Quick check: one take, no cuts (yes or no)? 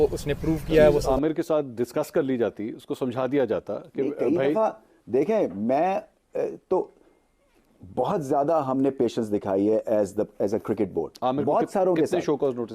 no